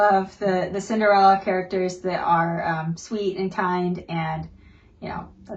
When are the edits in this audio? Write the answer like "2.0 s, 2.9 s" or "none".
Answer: none